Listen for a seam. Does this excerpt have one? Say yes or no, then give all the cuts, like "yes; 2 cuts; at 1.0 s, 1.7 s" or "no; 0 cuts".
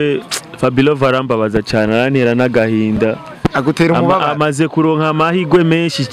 no; 0 cuts